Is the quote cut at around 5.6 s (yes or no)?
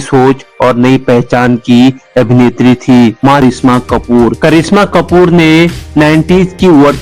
no